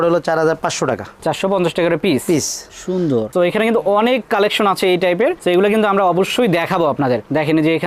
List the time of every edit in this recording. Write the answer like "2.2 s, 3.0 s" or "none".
3.3 s

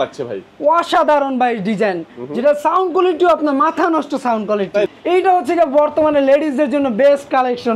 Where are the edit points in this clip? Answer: 4.9 s

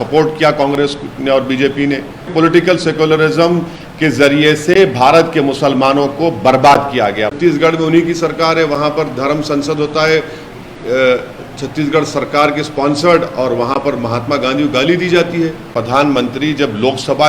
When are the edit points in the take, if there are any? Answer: 2.3 s, 7.4 s, 15.7 s

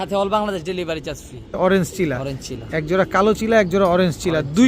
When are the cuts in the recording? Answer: 1.5 s

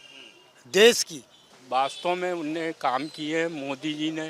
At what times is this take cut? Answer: 1.5 s

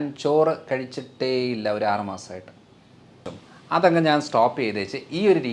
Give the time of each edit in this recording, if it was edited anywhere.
3.3 s

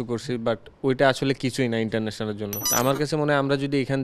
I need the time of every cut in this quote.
2.5 s

